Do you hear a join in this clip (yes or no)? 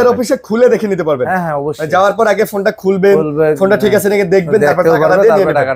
no